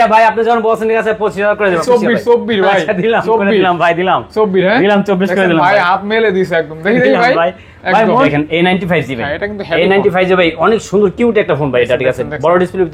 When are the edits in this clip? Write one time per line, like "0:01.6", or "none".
0:01.8
0:08.3